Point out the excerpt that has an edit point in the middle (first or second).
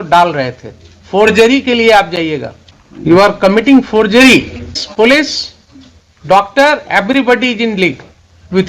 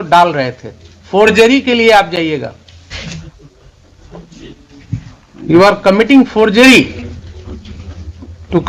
first